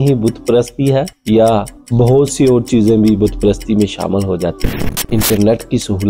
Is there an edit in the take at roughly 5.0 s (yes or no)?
yes